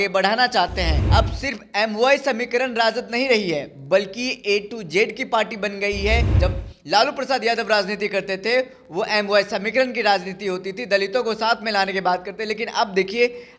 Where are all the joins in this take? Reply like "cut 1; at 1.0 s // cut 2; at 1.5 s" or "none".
cut 1; at 1.0 s // cut 2; at 6.3 s